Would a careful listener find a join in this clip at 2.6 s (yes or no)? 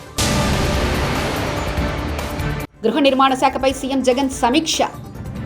yes